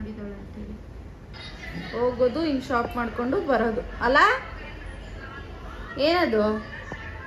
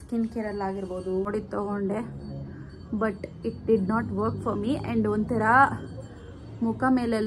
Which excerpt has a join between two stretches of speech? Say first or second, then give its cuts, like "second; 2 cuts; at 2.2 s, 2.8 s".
second; 1 cut; at 1.3 s